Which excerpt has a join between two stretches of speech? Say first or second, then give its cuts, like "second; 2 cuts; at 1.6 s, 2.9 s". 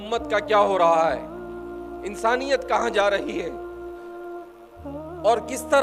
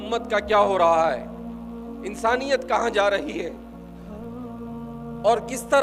second; 2 cuts; at 3.5 s, 4.9 s